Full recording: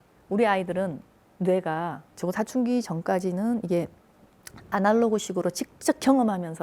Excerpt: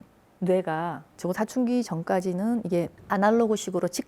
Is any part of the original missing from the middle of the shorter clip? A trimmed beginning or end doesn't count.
yes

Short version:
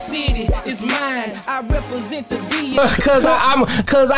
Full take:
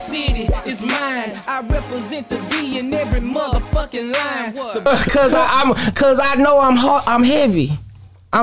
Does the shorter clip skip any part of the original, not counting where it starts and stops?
yes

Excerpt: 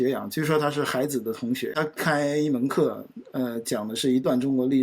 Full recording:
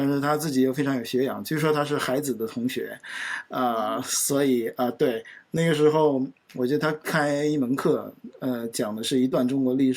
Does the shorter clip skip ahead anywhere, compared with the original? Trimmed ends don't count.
yes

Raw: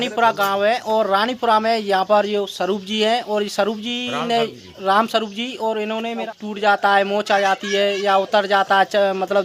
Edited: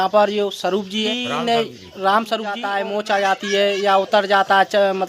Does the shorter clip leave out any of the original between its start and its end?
yes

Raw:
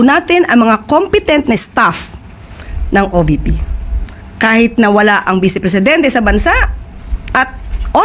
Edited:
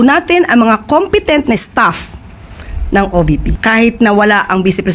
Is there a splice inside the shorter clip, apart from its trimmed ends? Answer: yes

